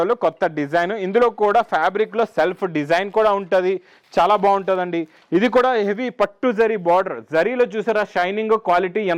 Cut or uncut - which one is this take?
uncut